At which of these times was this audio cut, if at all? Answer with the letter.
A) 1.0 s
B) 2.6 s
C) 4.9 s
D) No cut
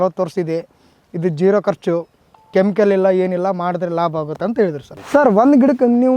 C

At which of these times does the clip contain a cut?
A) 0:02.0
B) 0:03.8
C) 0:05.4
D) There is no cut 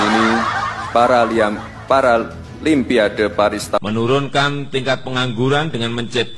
B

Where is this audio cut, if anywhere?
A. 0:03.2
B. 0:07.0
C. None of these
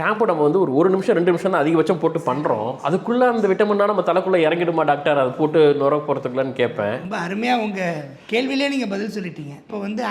C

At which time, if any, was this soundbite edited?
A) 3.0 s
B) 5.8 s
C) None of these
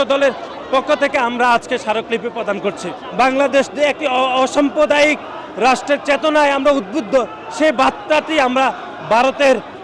A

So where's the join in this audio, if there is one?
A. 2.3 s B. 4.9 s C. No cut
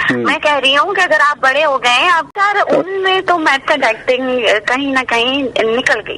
A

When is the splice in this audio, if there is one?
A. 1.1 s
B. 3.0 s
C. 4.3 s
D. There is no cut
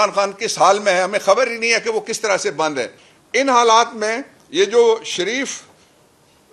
B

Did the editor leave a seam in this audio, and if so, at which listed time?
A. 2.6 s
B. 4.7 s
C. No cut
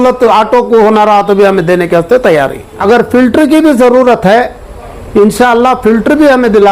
A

